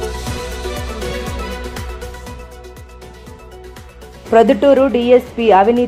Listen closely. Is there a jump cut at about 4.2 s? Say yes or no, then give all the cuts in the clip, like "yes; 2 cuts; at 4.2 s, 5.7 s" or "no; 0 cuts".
yes; 1 cut; at 4.2 s